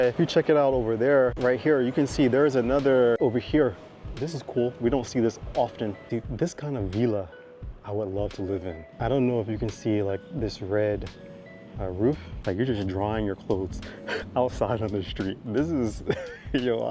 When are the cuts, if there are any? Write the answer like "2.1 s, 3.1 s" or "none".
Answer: 1.4 s, 3.2 s, 6.1 s, 8.9 s, 12.3 s